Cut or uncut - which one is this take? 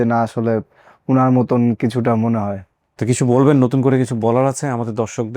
cut